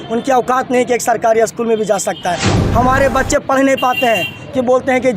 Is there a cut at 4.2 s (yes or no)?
no